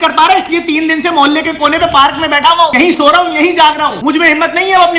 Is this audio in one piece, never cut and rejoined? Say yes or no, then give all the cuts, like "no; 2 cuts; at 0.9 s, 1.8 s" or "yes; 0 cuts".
no; 2 cuts; at 2.7 s, 4.0 s